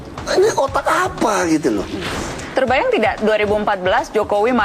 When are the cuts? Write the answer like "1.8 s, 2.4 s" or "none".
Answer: 2.1 s